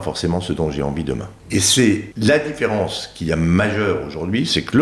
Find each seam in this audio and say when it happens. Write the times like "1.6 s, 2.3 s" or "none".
1.3 s, 2.1 s